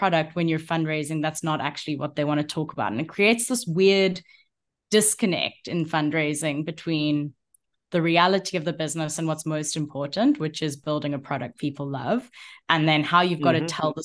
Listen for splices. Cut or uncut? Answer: uncut